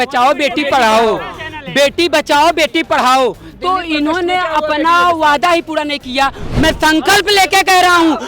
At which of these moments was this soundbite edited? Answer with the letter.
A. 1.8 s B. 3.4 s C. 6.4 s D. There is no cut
C